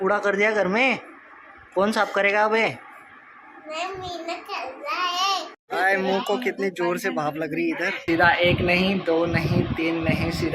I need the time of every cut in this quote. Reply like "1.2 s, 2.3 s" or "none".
5.6 s, 8.0 s